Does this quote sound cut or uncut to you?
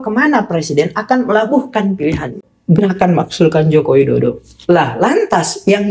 cut